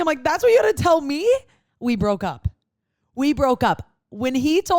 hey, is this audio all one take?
yes; 0 cuts

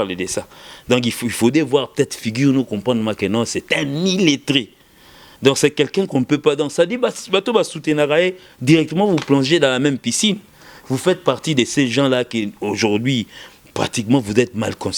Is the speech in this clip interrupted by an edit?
no; 0 cuts

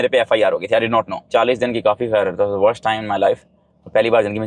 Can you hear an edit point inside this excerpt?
yes; 1 cut; at 1.3 s

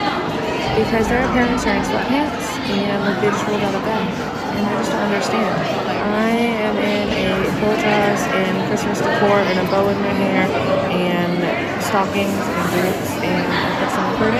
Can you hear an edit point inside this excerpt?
no; 0 cuts

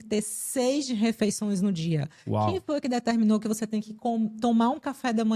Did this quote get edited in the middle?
no; 0 cuts

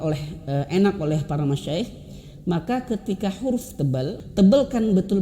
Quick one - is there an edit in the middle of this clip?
yes; 1 cut; at 4.2 s

